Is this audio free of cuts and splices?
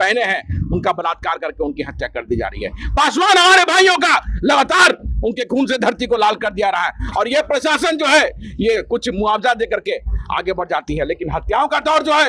yes; 0 cuts

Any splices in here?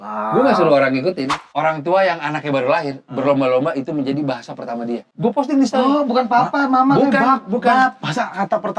yes; 1 cut; at 1.3 s

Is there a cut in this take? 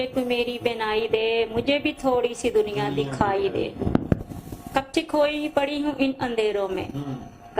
no; 0 cuts

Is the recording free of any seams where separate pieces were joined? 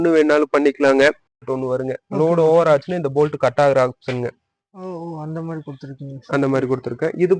no; 1 cut; at 1.4 s

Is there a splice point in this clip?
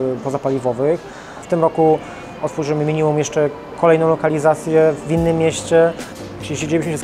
yes; 2 cuts; at 1.4 s, 6.1 s

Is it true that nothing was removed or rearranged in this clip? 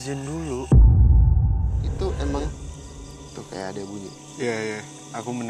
no; 1 cut; at 1.8 s

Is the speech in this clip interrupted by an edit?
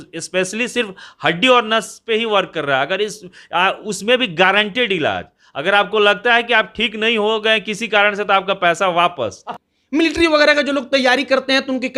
yes; 1 cut; at 9.5 s

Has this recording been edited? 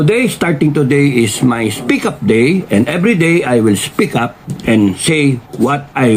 no; 0 cuts

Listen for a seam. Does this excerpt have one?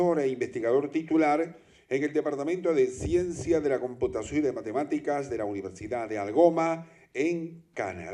yes; 1 cut; at 5.7 s

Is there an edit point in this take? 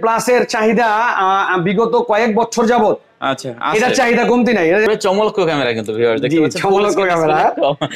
yes; 1 cut; at 4.9 s

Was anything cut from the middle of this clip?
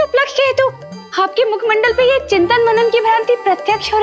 no; 0 cuts

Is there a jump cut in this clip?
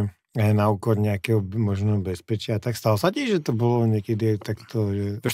no; 0 cuts

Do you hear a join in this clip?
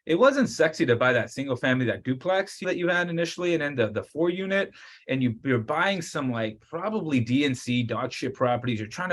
yes; 1 cut; at 2.6 s

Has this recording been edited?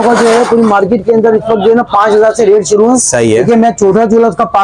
no; 0 cuts

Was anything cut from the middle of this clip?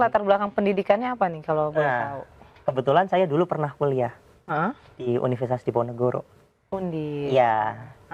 no; 0 cuts

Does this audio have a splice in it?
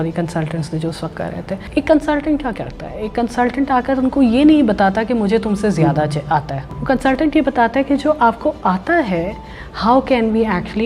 yes; 2 cuts; at 1.6 s, 6.7 s

